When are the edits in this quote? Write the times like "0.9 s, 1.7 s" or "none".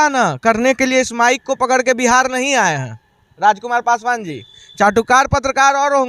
none